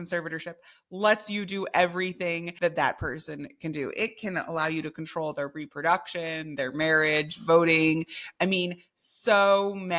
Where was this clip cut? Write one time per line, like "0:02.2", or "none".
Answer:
0:02.5